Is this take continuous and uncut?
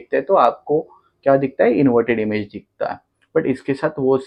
yes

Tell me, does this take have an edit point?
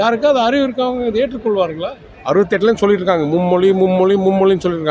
yes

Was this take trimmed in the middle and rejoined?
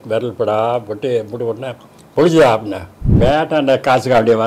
yes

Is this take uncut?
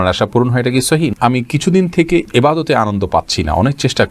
no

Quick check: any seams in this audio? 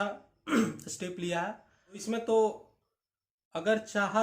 yes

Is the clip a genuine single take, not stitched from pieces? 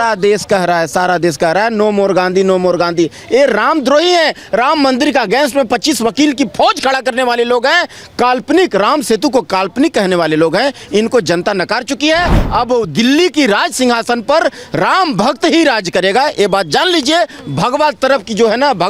yes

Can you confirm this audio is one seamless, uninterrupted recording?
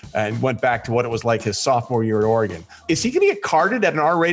no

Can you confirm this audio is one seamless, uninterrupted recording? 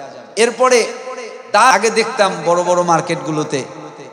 no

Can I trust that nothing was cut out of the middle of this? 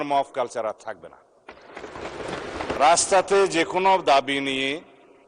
no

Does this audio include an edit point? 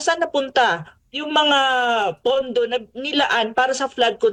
no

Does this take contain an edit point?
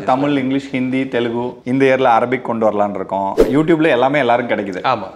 yes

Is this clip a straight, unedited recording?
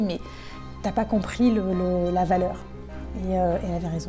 yes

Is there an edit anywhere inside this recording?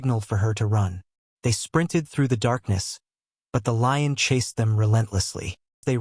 no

